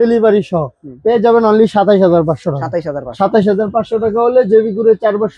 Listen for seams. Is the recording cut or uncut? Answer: uncut